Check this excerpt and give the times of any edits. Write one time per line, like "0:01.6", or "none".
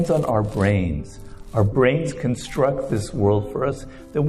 0:01.7